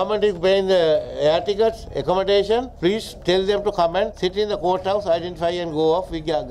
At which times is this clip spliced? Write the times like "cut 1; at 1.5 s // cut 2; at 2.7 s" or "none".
cut 1; at 4.1 s